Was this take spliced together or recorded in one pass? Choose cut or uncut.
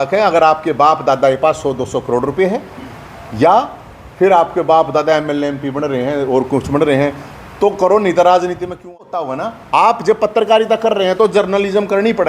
cut